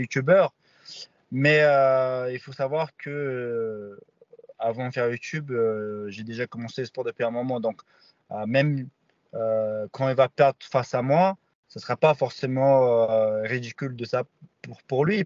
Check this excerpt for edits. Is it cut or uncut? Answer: uncut